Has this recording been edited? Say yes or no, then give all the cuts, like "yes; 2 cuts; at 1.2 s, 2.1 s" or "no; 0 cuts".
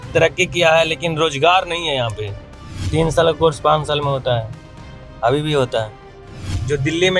yes; 2 cuts; at 2.8 s, 6.2 s